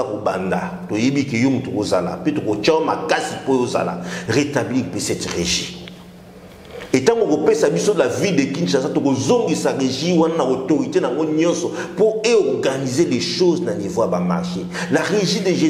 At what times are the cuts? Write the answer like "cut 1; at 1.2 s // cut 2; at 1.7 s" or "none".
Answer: none